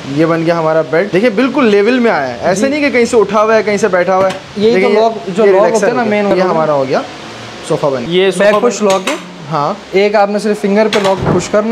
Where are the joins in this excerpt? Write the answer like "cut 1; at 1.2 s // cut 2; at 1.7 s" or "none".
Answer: cut 1; at 1.1 s // cut 2; at 6.3 s // cut 3; at 8.0 s